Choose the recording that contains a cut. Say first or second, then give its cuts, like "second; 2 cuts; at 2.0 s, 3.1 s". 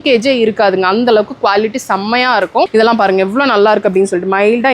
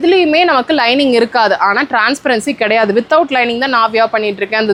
first; 1 cut; at 2.7 s